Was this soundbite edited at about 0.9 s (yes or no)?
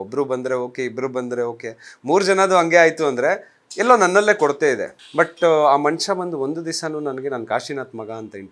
no